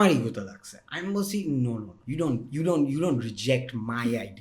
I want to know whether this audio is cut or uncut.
cut